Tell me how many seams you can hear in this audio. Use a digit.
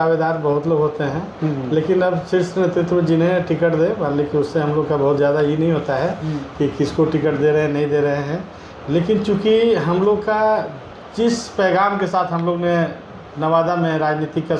0